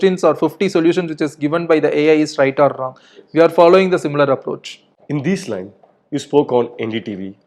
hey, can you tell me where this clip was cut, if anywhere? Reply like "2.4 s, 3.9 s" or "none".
none